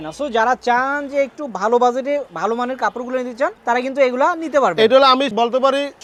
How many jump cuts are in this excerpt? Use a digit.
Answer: 0